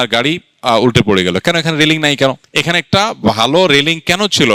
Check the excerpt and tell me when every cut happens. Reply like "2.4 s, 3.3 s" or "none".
2.5 s